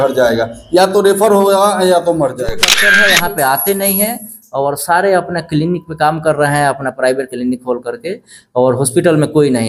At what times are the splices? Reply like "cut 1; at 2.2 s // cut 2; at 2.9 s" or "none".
cut 1; at 2.8 s